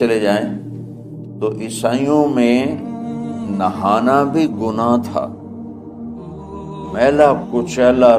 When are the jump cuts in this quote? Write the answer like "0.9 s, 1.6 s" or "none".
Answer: 5.3 s, 6.9 s